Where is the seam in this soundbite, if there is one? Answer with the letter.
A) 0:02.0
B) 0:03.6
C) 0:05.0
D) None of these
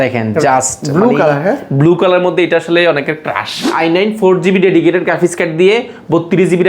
B